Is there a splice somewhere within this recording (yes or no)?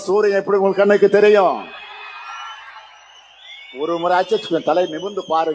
no